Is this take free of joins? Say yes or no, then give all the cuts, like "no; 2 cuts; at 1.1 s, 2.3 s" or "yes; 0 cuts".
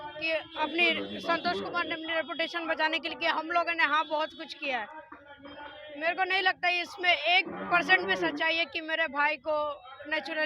yes; 0 cuts